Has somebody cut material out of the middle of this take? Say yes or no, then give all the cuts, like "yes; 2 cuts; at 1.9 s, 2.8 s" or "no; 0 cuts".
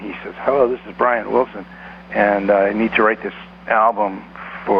no; 0 cuts